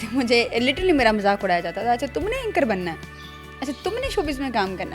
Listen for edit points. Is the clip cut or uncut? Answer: uncut